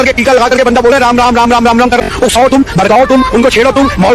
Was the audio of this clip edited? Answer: yes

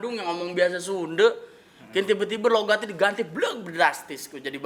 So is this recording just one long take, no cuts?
yes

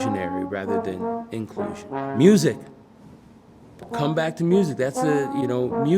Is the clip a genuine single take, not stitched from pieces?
no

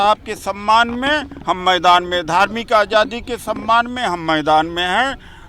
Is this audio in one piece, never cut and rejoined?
yes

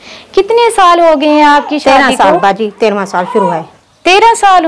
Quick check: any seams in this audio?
no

